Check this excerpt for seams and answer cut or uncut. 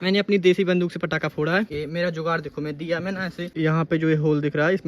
cut